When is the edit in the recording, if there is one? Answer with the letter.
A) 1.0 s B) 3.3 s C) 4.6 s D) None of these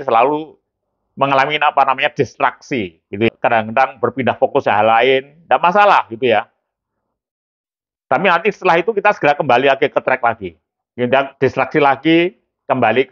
B